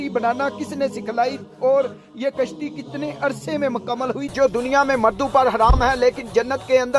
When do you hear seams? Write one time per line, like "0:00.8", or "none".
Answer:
0:04.3